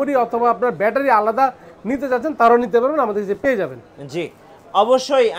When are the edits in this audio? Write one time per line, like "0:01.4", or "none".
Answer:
none